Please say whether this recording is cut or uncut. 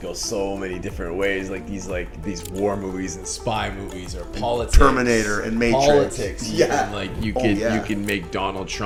uncut